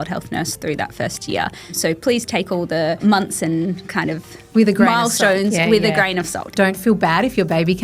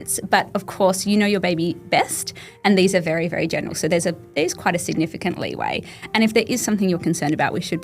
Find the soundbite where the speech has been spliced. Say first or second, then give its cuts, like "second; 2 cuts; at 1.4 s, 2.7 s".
first; 4 cuts; at 1.8 s, 3.0 s, 4.3 s, 6.5 s